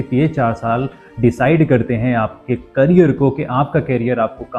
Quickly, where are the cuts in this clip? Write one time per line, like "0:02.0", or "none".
none